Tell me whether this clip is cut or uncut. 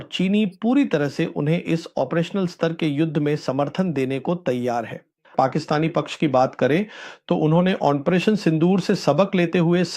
cut